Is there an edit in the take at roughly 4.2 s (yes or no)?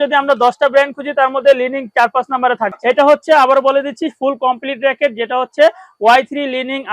no